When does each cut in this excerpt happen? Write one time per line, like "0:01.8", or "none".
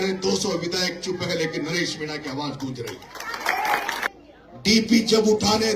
0:04.0